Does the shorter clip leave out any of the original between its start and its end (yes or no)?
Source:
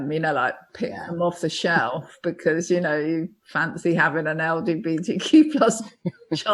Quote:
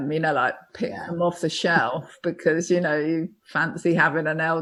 no